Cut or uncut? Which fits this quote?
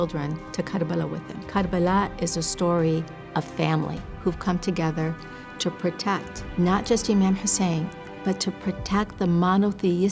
cut